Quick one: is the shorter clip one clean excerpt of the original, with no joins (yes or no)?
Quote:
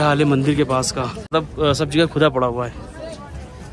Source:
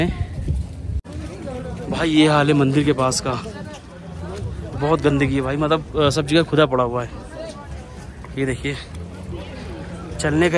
no